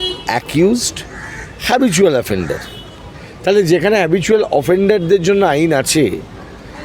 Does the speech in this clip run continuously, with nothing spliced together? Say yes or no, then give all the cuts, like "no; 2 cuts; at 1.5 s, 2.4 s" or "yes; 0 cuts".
yes; 0 cuts